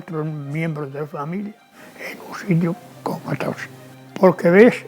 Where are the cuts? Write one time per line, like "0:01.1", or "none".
0:03.6